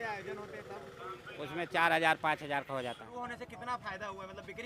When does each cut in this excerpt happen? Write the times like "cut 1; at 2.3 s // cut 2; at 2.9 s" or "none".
cut 1; at 3.0 s